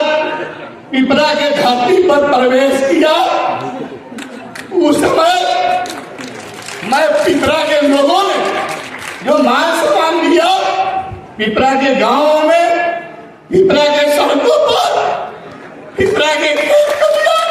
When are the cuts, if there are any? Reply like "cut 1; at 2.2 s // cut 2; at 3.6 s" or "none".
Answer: none